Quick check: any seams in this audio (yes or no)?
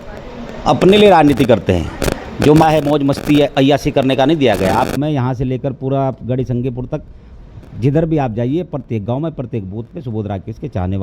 yes